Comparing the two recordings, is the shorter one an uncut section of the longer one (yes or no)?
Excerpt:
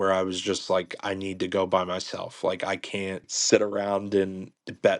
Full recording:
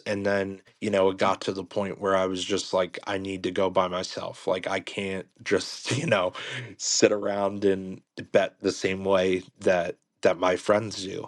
no